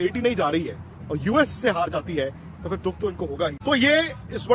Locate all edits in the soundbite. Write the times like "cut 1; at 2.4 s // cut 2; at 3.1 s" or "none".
cut 1; at 3.6 s